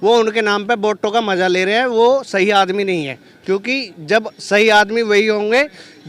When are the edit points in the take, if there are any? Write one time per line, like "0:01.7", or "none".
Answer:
none